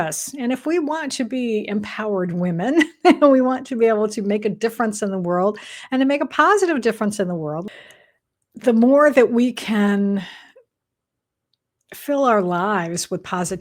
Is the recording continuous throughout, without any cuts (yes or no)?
no